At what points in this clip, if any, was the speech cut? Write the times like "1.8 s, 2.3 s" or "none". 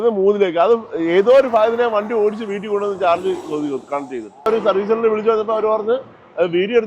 4.5 s